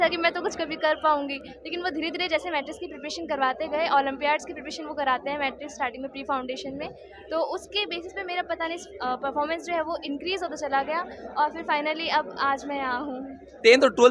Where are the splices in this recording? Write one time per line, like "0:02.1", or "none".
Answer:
none